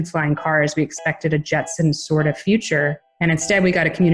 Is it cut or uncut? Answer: cut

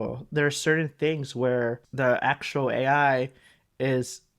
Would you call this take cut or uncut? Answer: cut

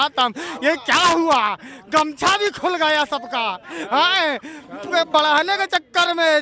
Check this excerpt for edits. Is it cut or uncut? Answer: uncut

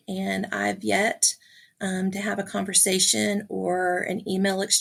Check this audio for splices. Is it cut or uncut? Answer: uncut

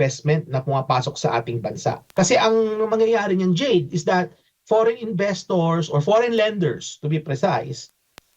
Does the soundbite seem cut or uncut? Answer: cut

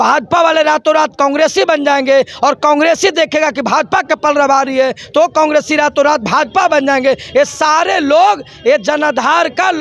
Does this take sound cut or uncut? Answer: uncut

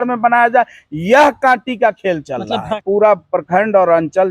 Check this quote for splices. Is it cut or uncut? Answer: cut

